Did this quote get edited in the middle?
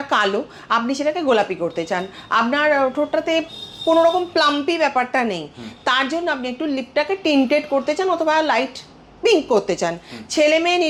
no; 0 cuts

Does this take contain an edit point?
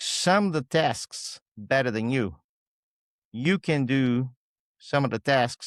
no; 0 cuts

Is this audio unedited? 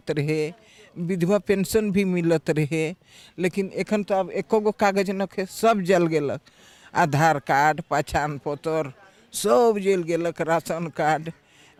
yes; 0 cuts

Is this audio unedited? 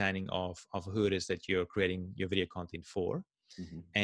yes; 0 cuts

